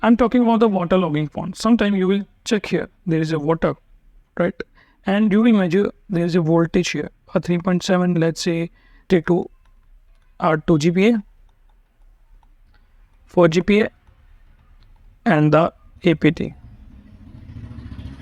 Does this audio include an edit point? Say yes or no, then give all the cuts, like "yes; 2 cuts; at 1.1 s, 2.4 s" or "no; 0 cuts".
yes; 1 cut; at 9.0 s